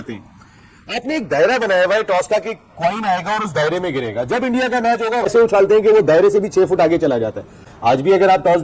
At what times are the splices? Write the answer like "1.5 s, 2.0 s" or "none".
none